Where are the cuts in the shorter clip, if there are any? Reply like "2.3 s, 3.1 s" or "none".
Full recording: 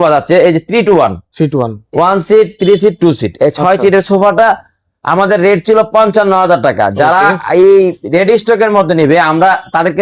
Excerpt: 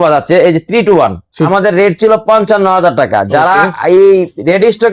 1.5 s